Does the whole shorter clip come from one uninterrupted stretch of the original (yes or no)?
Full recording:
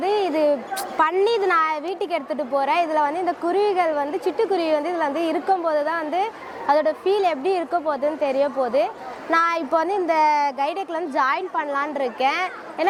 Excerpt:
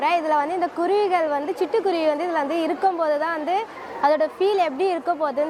yes